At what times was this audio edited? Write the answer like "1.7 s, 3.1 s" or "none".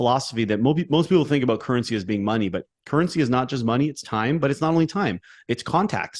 none